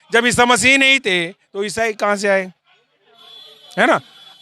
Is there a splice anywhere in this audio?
no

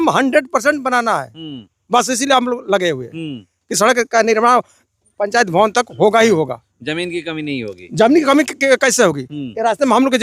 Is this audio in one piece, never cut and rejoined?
yes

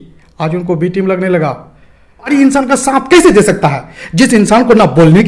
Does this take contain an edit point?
yes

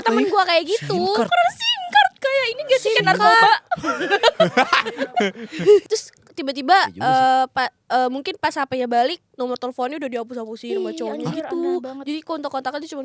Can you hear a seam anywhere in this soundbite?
yes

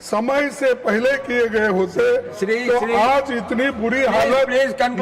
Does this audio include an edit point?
no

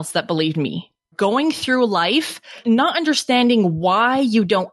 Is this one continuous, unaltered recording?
no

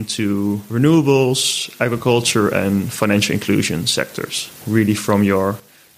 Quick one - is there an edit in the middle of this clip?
no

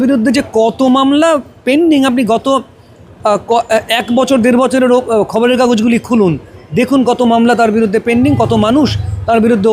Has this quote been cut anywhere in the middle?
no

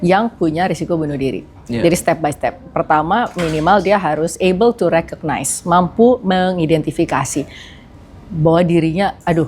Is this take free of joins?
yes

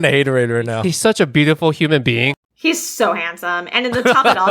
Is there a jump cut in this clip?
yes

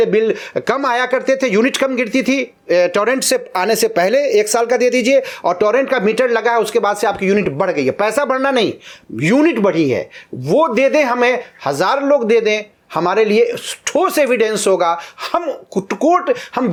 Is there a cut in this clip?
no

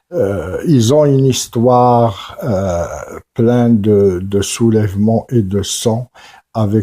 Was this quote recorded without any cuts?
no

